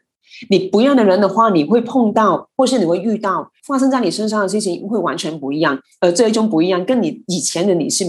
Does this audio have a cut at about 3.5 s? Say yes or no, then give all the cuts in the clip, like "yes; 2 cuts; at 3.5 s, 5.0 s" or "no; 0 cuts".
yes; 1 cut; at 3.5 s